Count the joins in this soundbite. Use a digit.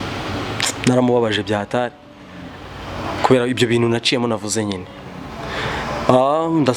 0